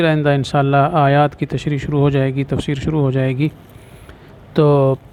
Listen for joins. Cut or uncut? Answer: uncut